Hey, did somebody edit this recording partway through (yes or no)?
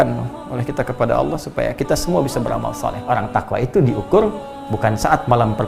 yes